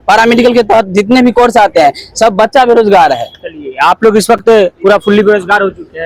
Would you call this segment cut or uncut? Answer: uncut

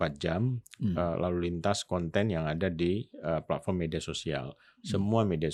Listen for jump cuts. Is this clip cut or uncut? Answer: uncut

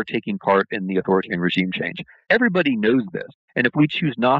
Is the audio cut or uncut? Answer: cut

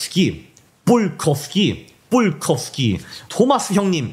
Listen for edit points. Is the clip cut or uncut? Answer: uncut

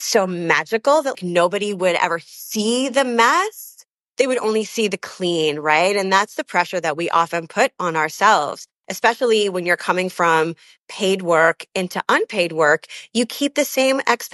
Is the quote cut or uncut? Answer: cut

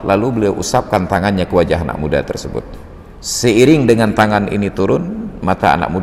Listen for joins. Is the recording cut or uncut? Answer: uncut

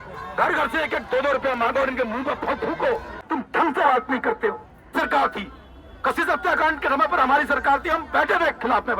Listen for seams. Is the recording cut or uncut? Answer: cut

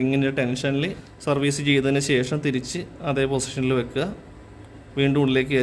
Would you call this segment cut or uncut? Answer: cut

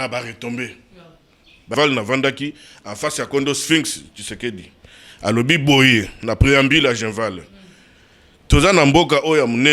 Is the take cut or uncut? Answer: cut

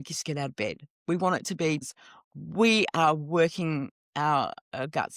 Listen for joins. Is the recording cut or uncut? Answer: cut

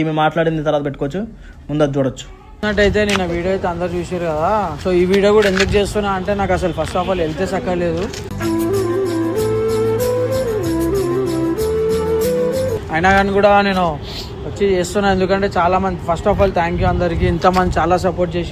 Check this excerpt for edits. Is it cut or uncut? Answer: uncut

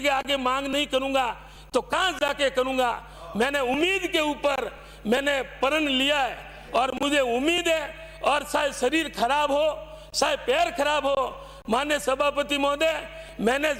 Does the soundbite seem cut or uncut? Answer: uncut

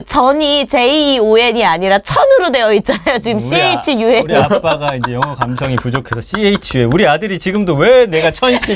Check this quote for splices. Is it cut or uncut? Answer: uncut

